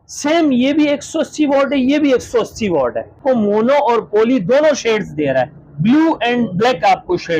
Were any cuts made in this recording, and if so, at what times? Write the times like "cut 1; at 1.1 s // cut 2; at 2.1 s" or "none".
cut 1; at 3.1 s